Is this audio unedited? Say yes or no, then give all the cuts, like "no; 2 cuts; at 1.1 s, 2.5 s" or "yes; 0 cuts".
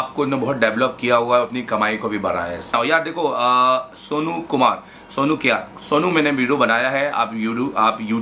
no; 1 cut; at 2.7 s